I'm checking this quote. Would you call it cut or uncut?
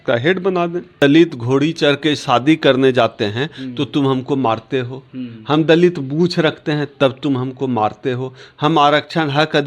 cut